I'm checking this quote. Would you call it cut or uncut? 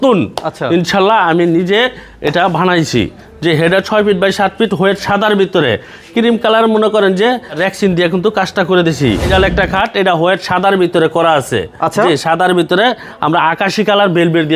cut